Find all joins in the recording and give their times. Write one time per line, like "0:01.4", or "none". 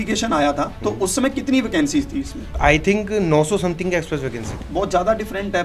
0:02.4
0:04.5